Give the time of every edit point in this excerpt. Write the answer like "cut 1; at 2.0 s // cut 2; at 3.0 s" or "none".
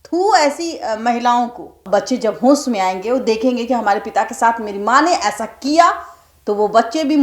cut 1; at 1.8 s